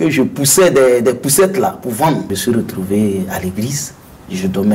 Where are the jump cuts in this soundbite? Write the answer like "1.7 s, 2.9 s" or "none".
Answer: 2.3 s